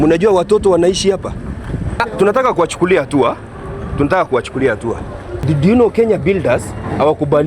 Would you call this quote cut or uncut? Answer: cut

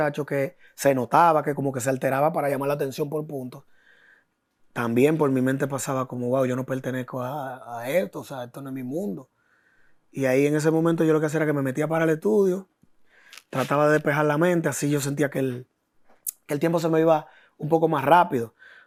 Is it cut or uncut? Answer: uncut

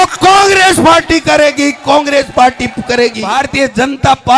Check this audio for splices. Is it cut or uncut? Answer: cut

